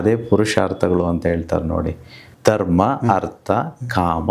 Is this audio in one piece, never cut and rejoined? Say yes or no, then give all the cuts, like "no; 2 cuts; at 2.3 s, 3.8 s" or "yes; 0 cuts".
yes; 0 cuts